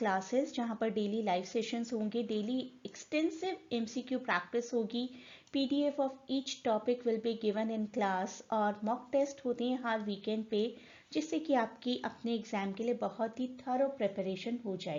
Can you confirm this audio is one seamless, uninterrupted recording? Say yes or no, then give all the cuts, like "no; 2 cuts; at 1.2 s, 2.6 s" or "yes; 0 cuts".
yes; 0 cuts